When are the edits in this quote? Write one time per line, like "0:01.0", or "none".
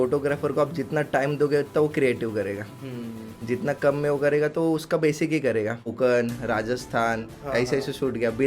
0:05.9